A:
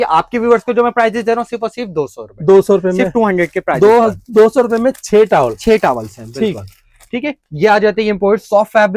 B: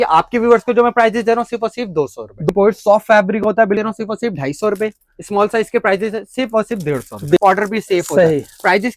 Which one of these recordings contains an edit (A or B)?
B